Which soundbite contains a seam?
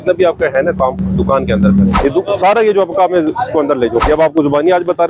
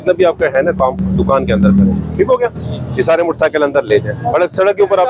first; 2 cuts; at 2.0 s, 4.0 s

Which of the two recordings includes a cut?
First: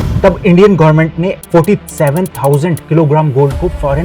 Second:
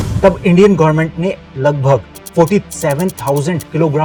first; 1 cut; at 1.4 s

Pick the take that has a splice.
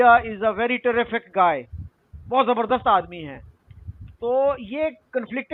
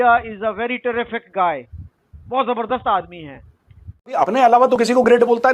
second; 1 cut; at 4.2 s

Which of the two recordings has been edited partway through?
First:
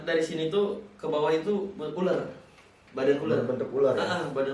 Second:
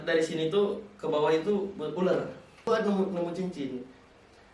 second; 1 cut; at 2.6 s

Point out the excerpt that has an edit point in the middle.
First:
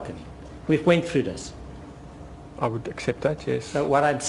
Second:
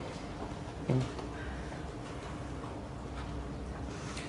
first; 1 cut; at 2.5 s

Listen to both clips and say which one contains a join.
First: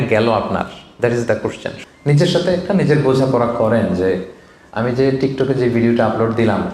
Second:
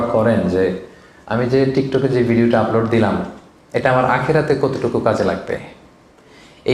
first; 1 cut; at 1.7 s

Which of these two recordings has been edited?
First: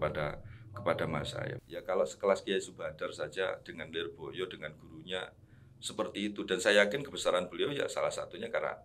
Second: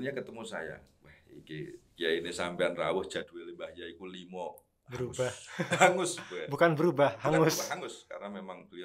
first; 1 cut; at 1.5 s

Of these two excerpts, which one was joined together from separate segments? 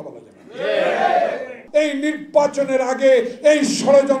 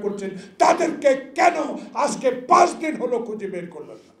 first; 1 cut; at 1.6 s

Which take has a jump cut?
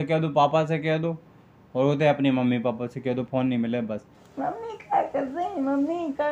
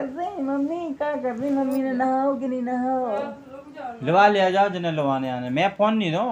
first; 1 cut; at 4.2 s

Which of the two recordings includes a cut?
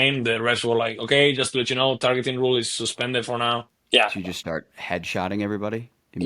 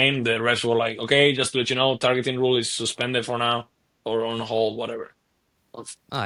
first; 1 cut; at 3.7 s

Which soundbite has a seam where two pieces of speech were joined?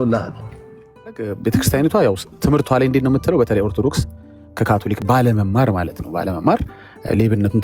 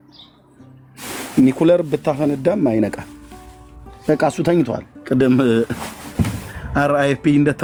first; 1 cut; at 1.3 s

